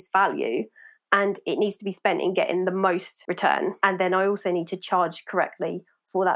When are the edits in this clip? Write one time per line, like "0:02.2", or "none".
0:03.3